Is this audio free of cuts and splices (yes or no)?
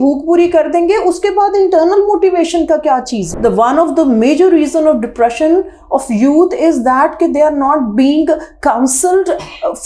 no